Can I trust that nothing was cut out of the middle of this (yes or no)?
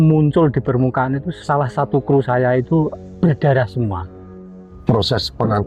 no